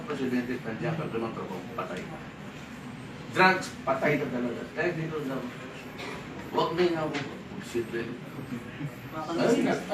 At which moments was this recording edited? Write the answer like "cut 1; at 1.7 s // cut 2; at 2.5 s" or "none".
cut 1; at 8.1 s